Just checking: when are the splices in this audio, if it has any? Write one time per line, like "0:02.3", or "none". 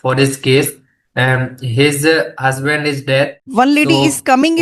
0:03.4